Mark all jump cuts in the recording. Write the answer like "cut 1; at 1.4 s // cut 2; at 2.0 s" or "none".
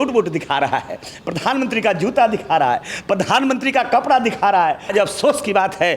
cut 1; at 4.9 s

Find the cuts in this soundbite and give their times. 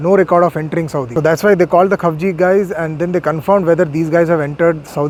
none

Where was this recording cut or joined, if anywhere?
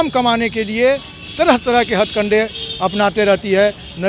none

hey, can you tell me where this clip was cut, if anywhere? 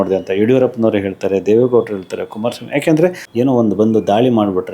cut 1; at 3.2 s

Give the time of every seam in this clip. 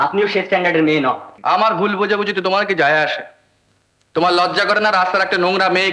cut 1; at 1.3 s

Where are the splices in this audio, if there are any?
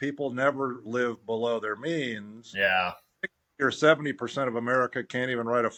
none

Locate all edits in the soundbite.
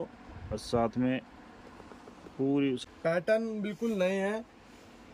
cut 1; at 2.8 s

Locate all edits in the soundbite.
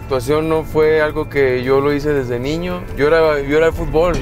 cut 1; at 2.8 s

